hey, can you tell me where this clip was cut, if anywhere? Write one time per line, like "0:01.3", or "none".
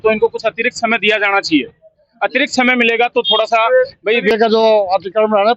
0:04.3